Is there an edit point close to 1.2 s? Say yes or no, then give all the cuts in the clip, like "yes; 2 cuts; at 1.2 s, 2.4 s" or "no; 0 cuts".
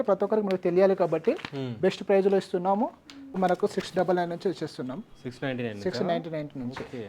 no; 1 cut; at 3.4 s